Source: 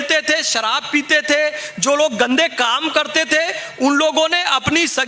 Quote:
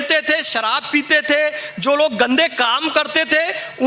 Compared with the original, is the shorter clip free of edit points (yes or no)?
yes